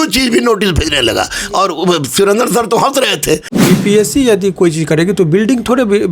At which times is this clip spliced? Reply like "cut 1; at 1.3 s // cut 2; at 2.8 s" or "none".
cut 1; at 3.5 s